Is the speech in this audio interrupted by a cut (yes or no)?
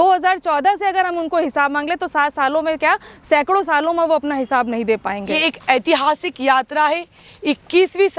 yes